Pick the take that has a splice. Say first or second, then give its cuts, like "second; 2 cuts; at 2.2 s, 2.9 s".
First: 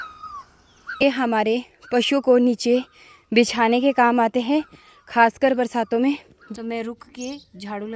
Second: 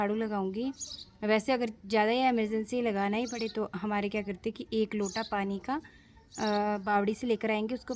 first; 2 cuts; at 1.0 s, 6.4 s